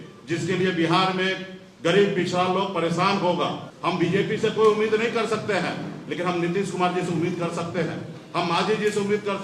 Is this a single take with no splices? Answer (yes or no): no